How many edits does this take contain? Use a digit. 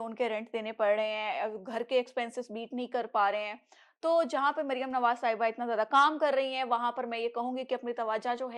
0